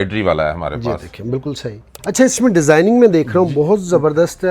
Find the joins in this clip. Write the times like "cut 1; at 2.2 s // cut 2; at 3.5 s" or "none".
cut 1; at 2.0 s

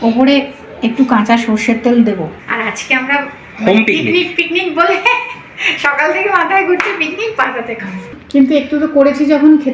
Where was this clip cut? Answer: cut 1; at 2.4 s // cut 2; at 8.1 s

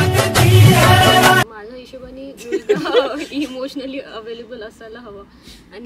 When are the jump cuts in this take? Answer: cut 1; at 1.4 s

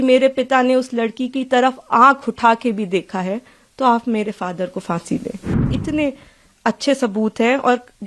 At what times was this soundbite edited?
cut 1; at 5.7 s

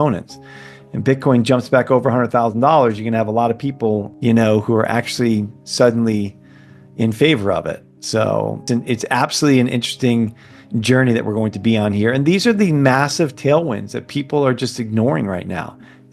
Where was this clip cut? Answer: cut 1; at 4.1 s // cut 2; at 8.6 s

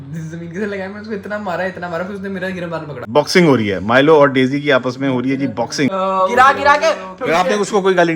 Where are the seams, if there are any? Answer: cut 1; at 3.0 s // cut 2; at 5.9 s

